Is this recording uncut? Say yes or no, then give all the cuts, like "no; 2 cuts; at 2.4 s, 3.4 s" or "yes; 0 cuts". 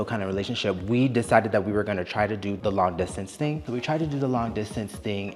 no; 2 cuts; at 2.6 s, 3.6 s